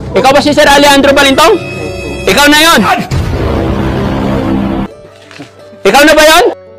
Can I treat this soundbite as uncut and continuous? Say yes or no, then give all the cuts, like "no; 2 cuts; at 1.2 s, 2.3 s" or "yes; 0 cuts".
no; 1 cut; at 2.9 s